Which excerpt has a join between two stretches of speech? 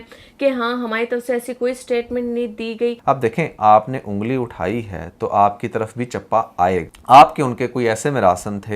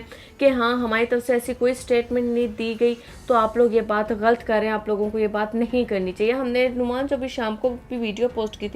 first; 2 cuts; at 3.0 s, 6.9 s

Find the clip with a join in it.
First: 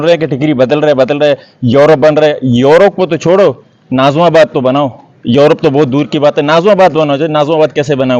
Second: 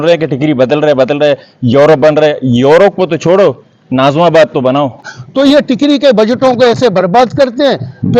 second; 1 cut; at 5.1 s

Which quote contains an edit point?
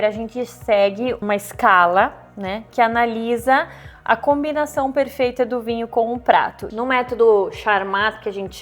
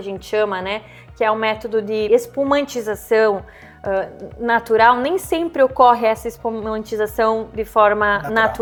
first; 2 cuts; at 1.2 s, 6.6 s

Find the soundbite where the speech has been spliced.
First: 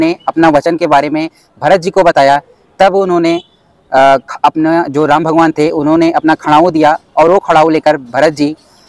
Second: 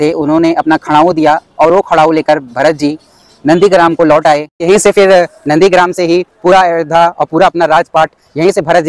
second; 1 cut; at 4.5 s

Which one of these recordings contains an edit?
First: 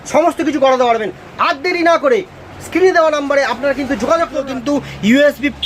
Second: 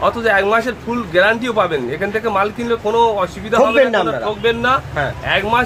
first; 1 cut; at 4.5 s

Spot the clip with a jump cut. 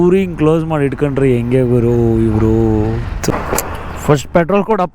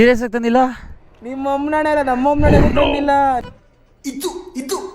first; 1 cut; at 3.3 s

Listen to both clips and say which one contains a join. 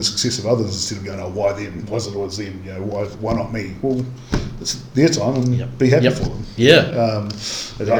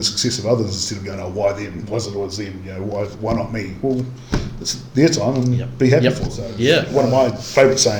second; 1 cut; at 6.9 s

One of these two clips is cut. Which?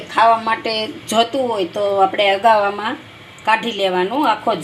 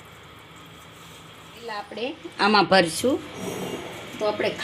second; 1 cut; at 1.9 s

